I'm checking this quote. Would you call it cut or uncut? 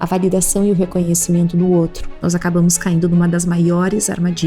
cut